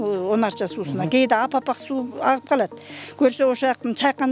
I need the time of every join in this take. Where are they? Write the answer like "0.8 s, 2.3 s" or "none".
none